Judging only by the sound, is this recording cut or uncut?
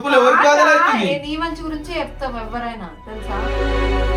uncut